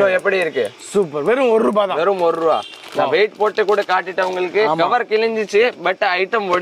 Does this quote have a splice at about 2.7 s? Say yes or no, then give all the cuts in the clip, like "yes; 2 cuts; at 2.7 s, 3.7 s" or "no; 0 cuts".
no; 0 cuts